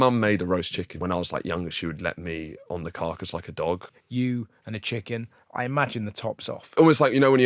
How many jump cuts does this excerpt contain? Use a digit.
3